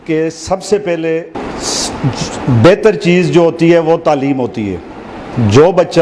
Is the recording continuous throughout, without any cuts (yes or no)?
no